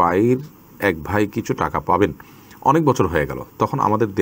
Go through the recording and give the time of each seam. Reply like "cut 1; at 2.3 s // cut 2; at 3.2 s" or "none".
none